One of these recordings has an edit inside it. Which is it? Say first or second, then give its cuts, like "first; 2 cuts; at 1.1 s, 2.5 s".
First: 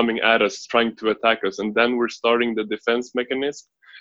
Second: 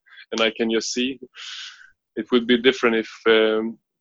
second; 1 cut; at 1.3 s